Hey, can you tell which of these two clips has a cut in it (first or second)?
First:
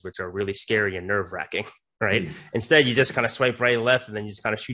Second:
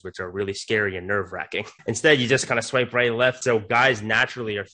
second